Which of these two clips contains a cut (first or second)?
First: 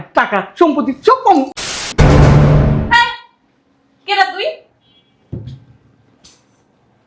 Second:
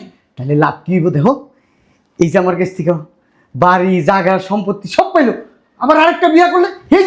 first